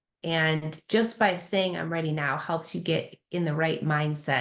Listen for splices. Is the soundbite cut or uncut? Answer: uncut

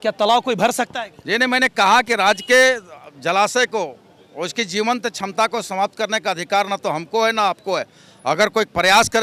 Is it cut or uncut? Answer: uncut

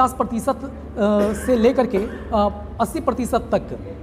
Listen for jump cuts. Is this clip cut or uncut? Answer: uncut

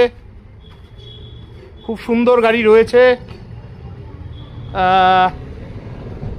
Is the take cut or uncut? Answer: uncut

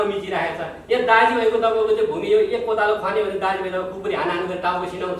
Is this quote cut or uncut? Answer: uncut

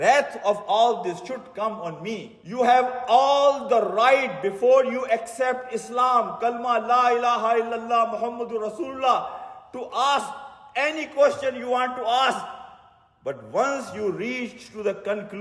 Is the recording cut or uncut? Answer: cut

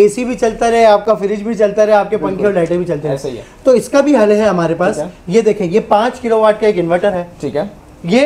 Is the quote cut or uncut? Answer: uncut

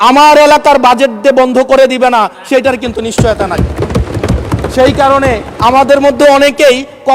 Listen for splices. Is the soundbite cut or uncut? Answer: uncut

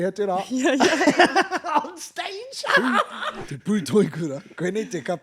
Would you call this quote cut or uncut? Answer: cut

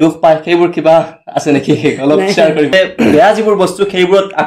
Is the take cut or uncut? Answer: cut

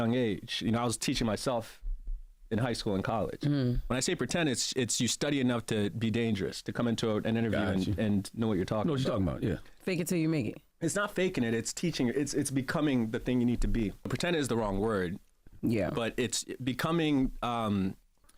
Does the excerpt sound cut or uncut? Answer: cut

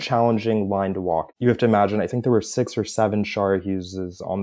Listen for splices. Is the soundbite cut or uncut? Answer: cut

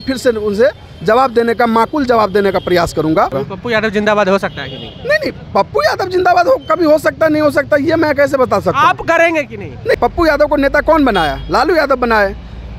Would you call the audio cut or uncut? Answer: cut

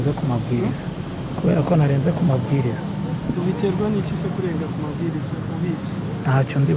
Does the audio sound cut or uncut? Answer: uncut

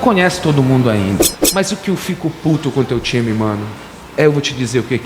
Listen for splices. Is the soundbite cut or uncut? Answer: cut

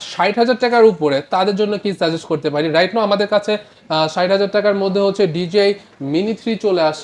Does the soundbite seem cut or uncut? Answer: uncut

